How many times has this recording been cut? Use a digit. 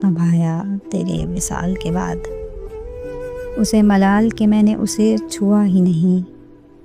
0